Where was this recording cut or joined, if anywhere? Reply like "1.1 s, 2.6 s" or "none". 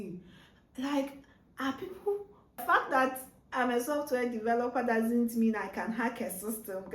2.6 s